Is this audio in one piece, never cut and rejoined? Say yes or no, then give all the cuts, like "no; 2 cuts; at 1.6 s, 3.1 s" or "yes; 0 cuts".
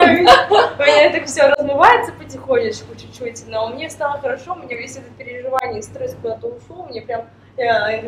yes; 0 cuts